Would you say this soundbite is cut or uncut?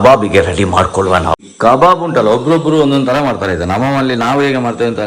cut